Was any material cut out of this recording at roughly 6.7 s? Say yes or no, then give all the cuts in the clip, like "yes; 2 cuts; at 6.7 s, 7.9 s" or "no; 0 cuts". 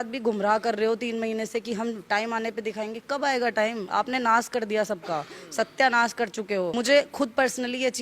yes; 1 cut; at 6.7 s